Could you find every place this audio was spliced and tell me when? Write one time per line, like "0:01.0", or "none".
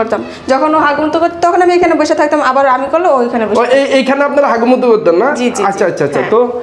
none